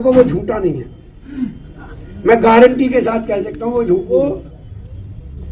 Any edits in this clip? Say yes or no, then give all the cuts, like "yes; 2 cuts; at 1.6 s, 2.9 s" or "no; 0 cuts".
yes; 1 cut; at 4.1 s